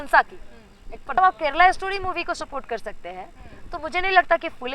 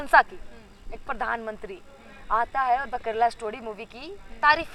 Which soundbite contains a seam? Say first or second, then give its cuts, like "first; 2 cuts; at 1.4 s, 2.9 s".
first; 1 cut; at 1.2 s